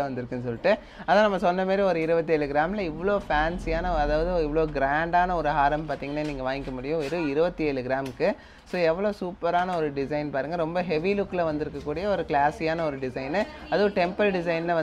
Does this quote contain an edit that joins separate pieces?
no; 0 cuts

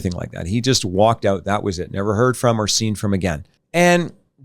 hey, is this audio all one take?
no; 1 cut; at 3.5 s

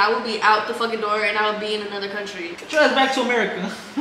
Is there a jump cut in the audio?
no; 0 cuts

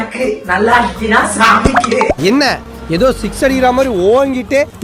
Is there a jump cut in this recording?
no; 0 cuts

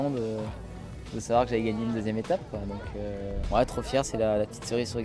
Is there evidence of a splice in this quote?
yes; 1 cut; at 3.4 s

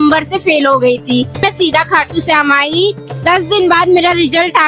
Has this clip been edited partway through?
yes; 2 cuts; at 1.4 s, 3.1 s

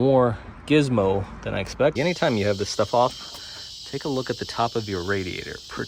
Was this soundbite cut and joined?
yes; 1 cut; at 1.9 s

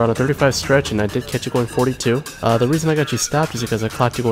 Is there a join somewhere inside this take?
yes; 1 cut; at 2.3 s

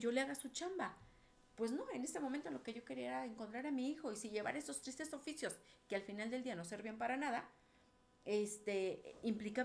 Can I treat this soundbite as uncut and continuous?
yes; 0 cuts

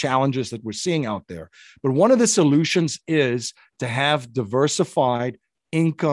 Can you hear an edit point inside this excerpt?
no; 0 cuts

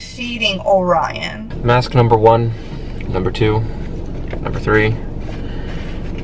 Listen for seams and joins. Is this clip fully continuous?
no; 1 cut; at 1.4 s

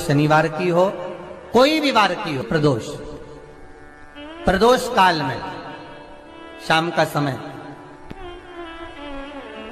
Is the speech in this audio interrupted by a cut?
yes; 1 cut; at 2.4 s

